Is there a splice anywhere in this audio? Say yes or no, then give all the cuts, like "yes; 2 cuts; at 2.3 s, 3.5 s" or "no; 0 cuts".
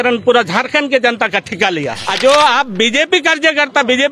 yes; 1 cut; at 2.0 s